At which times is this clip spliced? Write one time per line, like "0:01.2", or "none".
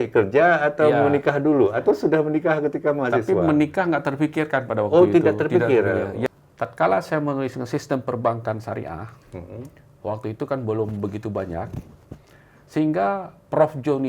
0:06.4